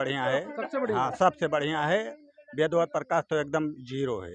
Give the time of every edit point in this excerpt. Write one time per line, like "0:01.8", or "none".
none